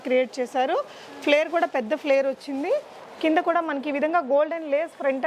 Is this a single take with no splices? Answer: yes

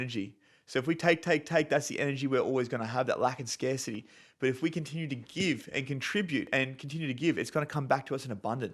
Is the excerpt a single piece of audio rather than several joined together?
no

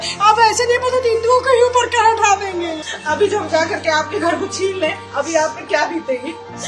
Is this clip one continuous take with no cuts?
no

